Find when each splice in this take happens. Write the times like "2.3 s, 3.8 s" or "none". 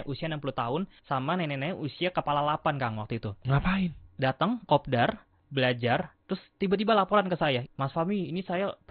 1.0 s, 5.3 s, 7.6 s